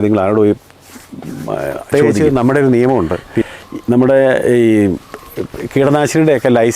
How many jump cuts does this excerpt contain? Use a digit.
1